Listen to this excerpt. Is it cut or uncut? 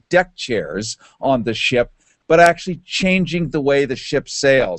cut